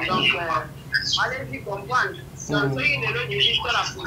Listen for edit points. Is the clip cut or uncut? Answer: uncut